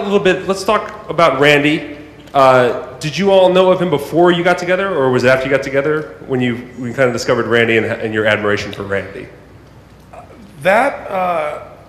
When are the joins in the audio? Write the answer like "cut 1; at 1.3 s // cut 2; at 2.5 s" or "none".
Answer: none